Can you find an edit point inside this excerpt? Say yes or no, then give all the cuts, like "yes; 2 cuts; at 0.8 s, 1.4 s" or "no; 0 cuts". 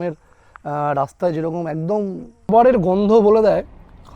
yes; 1 cut; at 2.5 s